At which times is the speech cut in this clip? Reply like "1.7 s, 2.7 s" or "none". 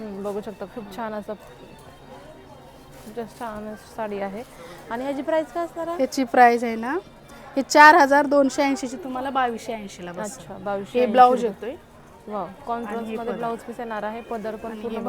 none